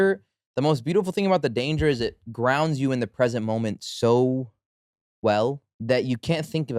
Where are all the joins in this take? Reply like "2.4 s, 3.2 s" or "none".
5.7 s